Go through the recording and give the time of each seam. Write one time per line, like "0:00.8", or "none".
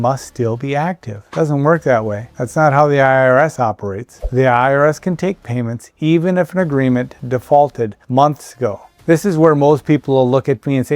0:08.9